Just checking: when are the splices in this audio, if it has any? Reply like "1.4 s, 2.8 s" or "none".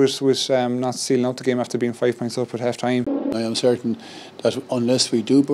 3.4 s